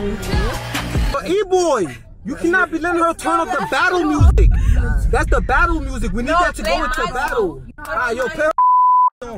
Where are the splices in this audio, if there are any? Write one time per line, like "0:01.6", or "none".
none